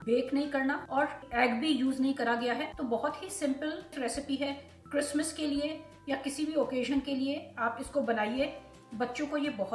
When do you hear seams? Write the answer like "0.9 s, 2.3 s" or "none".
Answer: none